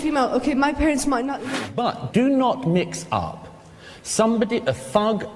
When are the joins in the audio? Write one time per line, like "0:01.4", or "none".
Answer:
0:01.6